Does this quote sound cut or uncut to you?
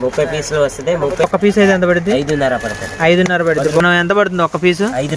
cut